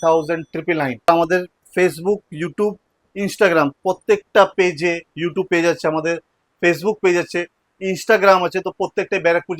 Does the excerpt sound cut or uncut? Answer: cut